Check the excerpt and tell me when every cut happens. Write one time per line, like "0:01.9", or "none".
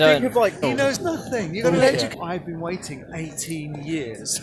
0:01.0
0:02.1